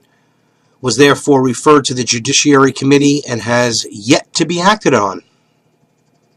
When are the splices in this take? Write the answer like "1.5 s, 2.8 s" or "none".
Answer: none